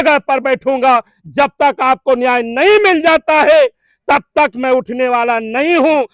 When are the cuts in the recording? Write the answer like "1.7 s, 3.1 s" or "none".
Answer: none